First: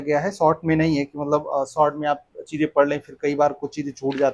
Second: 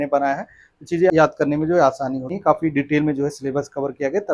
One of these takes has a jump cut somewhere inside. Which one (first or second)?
second